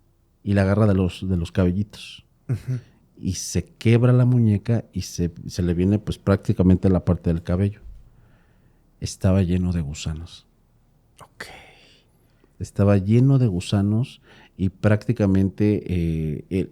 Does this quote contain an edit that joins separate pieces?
no; 0 cuts

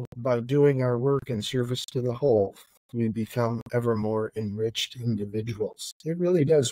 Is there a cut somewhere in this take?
no; 0 cuts

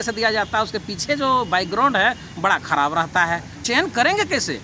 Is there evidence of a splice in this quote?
yes; 1 cut; at 3.6 s

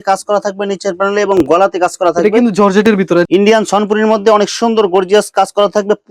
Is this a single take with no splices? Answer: no; 1 cut; at 3.3 s

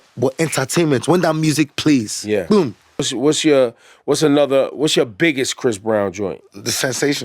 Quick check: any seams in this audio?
yes; 1 cut; at 3.1 s

